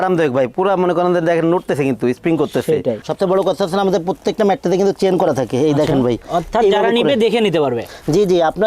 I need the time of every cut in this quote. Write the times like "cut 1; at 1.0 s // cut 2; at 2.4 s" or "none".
cut 1; at 3.0 s // cut 2; at 6.2 s